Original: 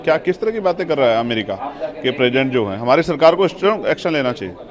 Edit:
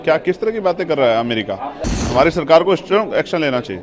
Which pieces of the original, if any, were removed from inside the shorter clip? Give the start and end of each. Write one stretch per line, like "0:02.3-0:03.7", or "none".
0:02.0-0:02.7